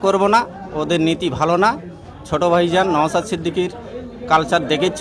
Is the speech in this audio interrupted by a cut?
no; 0 cuts

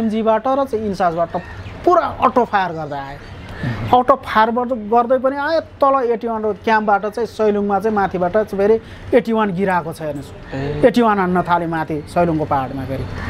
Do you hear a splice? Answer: no; 0 cuts

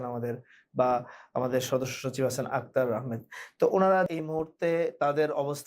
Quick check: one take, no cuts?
no; 1 cut; at 4.2 s

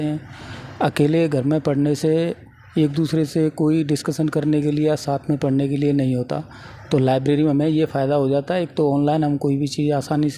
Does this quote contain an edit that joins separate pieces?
no; 0 cuts

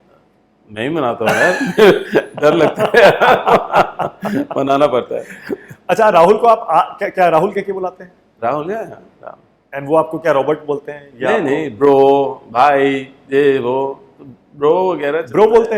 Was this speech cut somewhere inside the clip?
no; 0 cuts

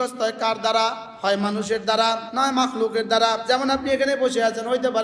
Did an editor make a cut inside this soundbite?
yes; 3 cuts; at 1.1 s, 2.3 s, 3.4 s

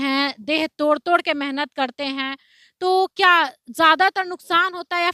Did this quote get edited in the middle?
no; 0 cuts

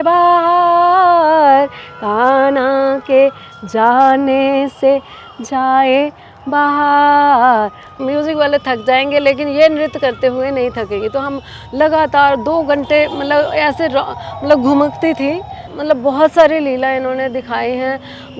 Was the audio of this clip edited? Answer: yes; 2 cuts; at 8.0 s, 15.7 s

